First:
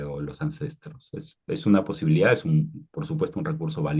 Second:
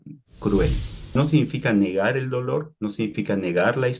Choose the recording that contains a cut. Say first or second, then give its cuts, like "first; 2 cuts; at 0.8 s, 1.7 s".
second; 1 cut; at 1.2 s